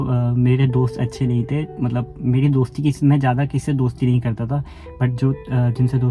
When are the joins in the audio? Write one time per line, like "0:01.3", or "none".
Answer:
none